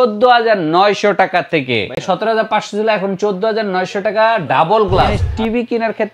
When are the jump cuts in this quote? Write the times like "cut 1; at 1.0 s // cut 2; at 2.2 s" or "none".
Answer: cut 1; at 2.0 s // cut 2; at 5.2 s